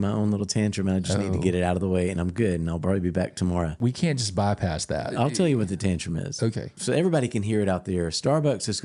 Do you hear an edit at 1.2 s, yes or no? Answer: no